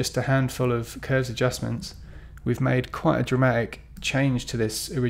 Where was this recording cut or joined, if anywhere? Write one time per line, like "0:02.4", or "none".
none